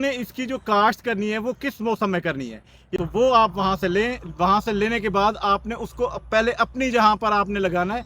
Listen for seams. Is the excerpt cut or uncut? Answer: cut